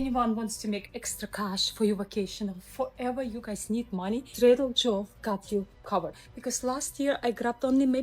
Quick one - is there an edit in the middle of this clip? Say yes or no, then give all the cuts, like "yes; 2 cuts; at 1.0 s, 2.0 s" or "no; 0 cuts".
yes; 1 cut; at 6.1 s